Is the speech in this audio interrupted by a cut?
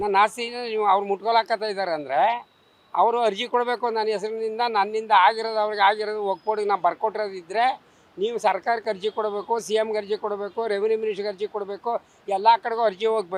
no; 0 cuts

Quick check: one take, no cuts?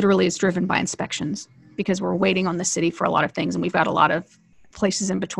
yes; 0 cuts

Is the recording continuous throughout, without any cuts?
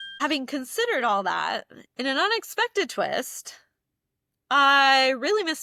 yes; 0 cuts

